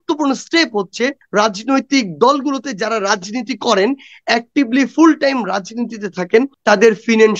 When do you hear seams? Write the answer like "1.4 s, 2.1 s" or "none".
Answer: 1.2 s, 6.6 s